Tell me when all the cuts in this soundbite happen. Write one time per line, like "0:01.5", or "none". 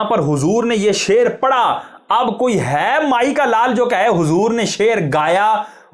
none